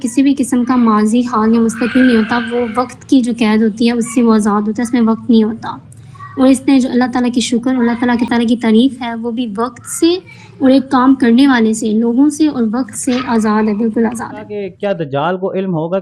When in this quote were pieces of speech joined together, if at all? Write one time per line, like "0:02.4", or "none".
0:08.3
0:14.6